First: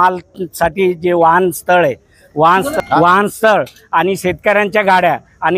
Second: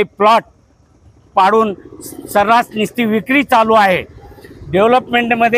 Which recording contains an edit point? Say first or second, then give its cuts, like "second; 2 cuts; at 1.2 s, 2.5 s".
first; 1 cut; at 2.7 s